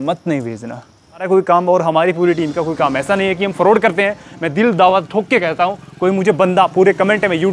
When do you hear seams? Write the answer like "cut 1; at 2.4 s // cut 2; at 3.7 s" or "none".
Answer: cut 1; at 1.3 s